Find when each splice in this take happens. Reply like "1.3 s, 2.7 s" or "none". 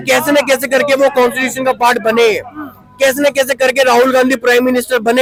none